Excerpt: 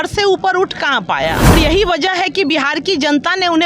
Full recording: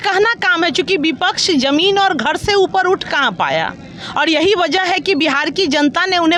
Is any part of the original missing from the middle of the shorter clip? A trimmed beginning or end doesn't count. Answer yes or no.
yes